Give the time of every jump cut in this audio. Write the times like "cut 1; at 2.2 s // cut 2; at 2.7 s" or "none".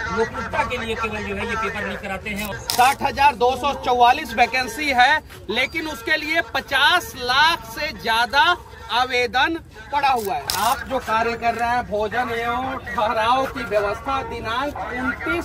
cut 1; at 2.5 s // cut 2; at 10.5 s